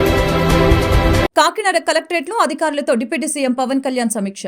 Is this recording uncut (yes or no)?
yes